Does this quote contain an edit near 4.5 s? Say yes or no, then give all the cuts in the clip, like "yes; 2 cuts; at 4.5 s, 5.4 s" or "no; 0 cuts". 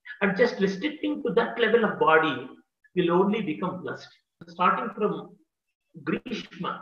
yes; 1 cut; at 4.5 s